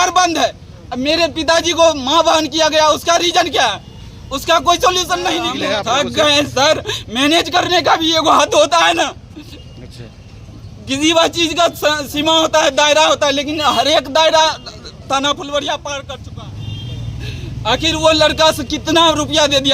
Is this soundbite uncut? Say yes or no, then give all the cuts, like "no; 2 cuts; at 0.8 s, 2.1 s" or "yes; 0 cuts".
no; 2 cuts; at 5.6 s, 16.2 s